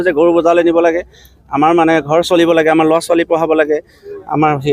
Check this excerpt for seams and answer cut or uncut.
uncut